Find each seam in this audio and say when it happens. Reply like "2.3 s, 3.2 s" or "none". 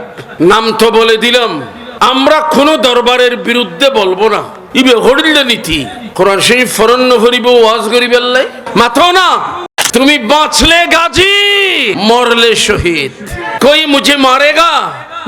9.6 s

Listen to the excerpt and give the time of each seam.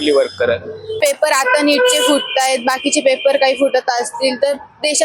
1.0 s

